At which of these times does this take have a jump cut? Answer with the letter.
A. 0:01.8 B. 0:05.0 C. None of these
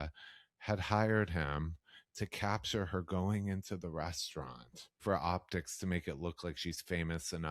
B